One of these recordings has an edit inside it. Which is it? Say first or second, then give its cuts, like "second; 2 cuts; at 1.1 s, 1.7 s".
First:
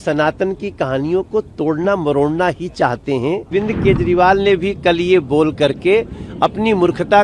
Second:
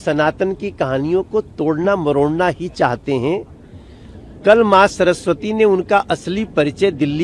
first; 1 cut; at 3.5 s